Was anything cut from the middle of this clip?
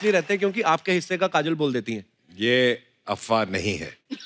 no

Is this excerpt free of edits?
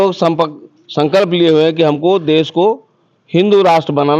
yes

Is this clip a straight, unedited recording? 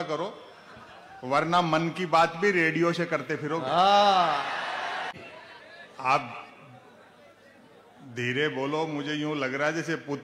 no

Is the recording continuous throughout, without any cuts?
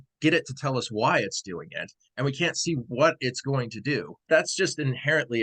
no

